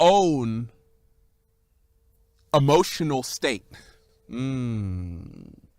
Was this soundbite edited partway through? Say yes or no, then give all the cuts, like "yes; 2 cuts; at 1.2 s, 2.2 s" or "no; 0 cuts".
yes; 1 cut; at 4.1 s